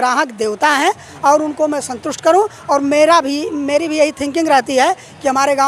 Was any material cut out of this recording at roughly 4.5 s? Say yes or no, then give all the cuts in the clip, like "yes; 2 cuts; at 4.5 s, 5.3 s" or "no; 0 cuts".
no; 0 cuts